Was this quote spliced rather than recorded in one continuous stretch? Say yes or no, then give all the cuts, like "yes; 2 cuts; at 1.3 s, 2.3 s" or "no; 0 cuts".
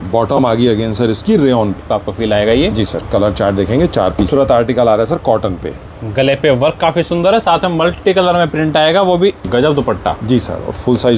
yes; 3 cuts; at 1.8 s, 4.3 s, 9.5 s